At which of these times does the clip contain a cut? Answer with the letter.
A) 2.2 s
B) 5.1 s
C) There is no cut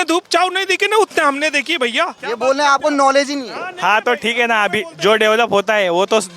A